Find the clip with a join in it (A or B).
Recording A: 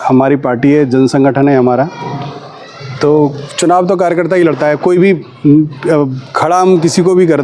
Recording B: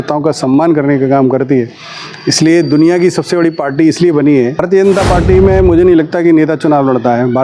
B